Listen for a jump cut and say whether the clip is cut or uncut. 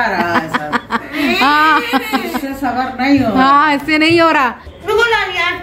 cut